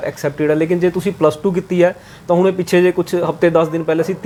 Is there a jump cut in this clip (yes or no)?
no